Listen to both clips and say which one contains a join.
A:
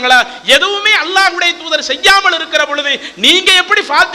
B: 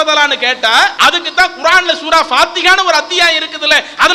B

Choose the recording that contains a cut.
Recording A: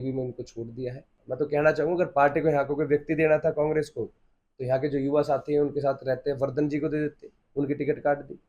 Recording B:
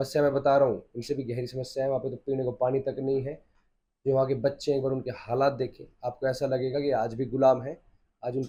A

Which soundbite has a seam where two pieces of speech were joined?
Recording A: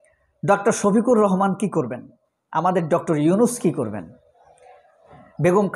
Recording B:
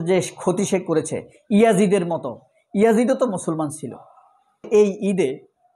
B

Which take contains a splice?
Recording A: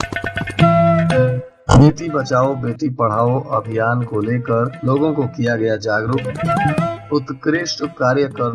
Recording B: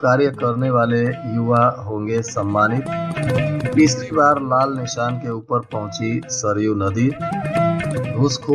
A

